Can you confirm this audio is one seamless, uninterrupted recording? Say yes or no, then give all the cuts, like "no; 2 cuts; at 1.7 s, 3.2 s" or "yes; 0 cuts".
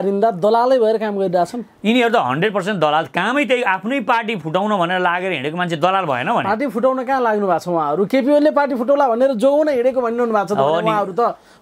yes; 0 cuts